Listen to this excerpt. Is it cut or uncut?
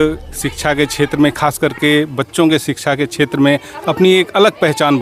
uncut